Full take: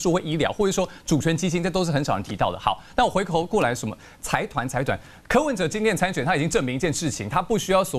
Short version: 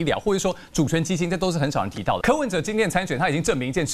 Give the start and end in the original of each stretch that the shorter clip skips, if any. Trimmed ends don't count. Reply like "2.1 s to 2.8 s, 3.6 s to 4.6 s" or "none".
2.5 s to 5.3 s